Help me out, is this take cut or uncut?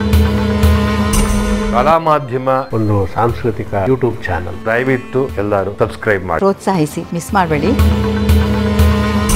cut